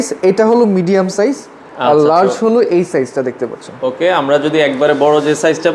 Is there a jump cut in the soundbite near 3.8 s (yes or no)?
no